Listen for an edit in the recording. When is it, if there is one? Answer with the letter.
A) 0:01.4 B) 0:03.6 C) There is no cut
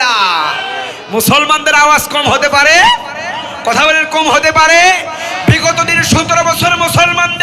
C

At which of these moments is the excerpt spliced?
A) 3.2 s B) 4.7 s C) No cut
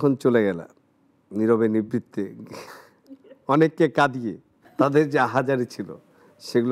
B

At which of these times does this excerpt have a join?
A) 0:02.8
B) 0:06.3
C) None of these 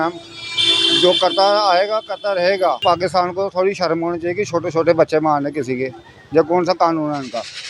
A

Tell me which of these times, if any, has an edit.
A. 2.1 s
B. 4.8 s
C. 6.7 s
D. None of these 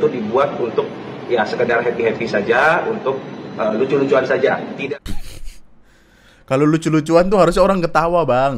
B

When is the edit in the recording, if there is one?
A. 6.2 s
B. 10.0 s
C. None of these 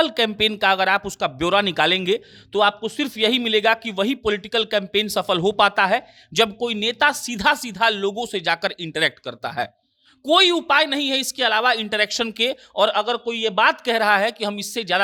C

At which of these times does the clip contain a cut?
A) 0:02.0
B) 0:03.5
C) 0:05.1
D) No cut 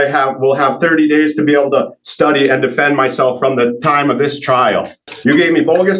C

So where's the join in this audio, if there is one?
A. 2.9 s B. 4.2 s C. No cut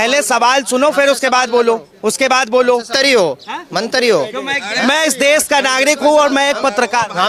A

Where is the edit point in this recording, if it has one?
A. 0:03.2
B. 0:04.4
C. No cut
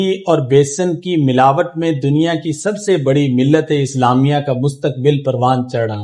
C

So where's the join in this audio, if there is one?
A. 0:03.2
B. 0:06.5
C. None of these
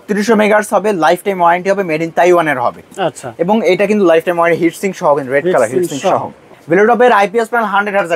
B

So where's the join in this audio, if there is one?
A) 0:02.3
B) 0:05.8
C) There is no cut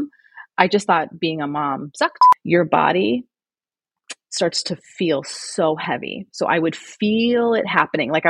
A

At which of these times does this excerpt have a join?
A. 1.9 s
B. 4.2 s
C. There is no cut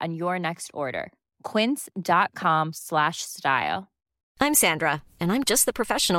B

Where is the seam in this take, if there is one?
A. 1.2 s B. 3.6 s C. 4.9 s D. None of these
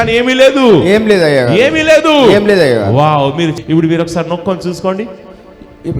B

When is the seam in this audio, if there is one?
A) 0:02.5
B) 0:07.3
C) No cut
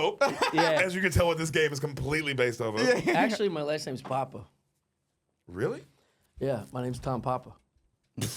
C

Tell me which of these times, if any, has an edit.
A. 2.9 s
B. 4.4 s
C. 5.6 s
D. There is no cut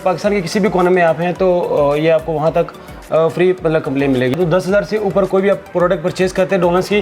B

